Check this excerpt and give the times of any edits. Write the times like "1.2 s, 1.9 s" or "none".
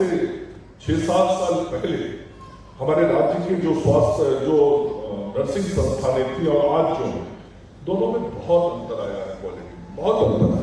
none